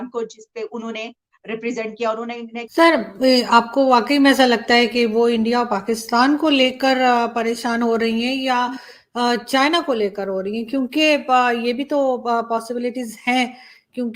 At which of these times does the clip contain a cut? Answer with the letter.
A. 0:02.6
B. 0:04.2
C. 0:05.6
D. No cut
A